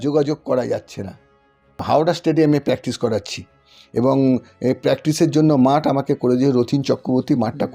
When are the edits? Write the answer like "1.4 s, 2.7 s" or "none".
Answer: 1.8 s